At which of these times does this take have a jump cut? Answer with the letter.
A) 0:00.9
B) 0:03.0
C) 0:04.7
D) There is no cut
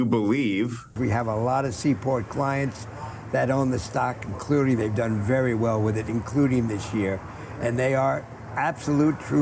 A